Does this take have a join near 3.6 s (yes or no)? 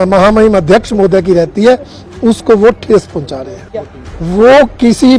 yes